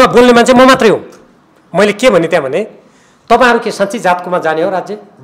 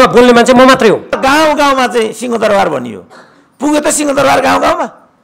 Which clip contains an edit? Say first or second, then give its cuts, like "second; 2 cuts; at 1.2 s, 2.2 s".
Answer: second; 1 cut; at 1.2 s